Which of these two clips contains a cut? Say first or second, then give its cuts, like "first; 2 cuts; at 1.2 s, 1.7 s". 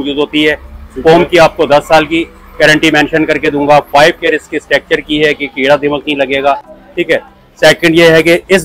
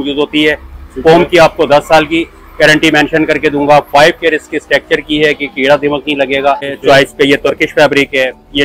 second; 1 cut; at 6.7 s